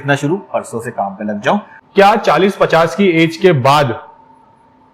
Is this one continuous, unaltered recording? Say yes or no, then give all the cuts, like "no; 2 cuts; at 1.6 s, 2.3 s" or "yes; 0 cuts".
no; 1 cut; at 1.8 s